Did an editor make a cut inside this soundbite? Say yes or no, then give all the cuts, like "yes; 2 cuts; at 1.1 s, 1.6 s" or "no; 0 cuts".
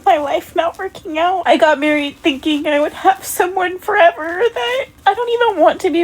yes; 2 cuts; at 1.4 s, 4.9 s